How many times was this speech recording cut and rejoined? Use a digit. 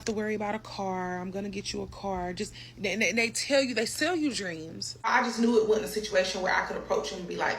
1